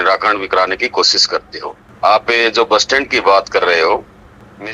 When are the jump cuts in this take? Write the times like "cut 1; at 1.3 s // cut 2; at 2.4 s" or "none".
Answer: none